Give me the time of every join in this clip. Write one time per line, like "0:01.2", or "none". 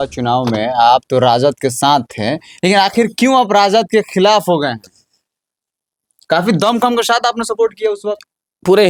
none